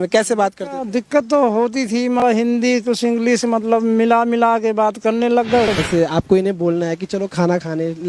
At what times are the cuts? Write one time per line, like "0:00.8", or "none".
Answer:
0:02.2
0:05.7